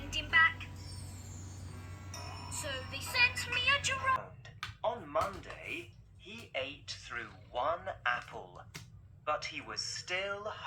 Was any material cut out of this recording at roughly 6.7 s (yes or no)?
no